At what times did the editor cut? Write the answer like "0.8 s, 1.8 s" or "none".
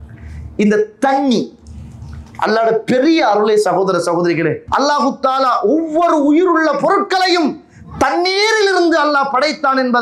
4.6 s